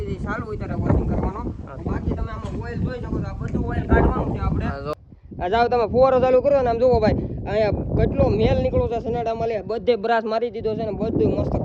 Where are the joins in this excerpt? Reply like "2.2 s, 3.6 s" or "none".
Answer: 5.0 s